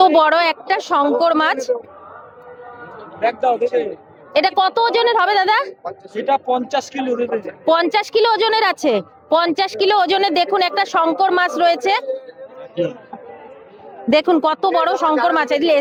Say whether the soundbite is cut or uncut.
uncut